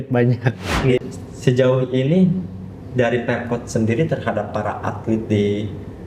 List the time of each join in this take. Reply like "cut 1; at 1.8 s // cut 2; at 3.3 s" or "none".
cut 1; at 1.0 s